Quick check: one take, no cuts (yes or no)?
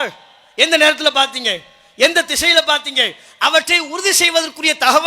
yes